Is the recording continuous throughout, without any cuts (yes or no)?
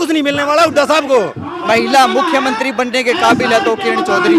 no